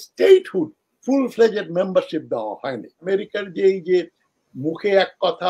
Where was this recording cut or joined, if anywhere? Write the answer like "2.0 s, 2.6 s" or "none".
2.9 s